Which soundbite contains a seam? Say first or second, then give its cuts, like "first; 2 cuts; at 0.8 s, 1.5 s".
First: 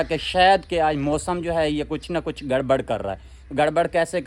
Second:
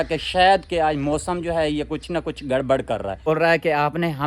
second; 1 cut; at 3.3 s